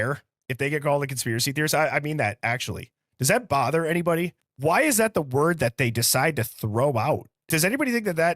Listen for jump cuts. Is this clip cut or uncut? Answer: cut